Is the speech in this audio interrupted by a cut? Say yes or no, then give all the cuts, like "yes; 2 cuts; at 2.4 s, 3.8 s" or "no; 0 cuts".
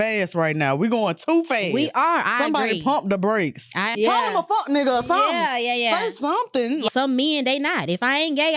yes; 2 cuts; at 3.9 s, 6.9 s